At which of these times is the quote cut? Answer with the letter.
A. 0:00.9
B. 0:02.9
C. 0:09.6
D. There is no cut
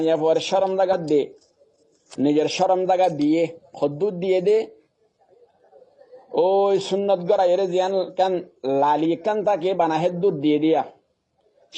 A